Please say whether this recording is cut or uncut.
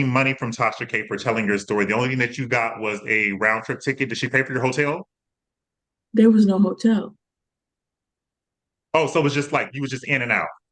uncut